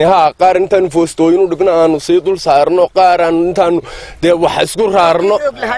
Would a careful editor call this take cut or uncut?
uncut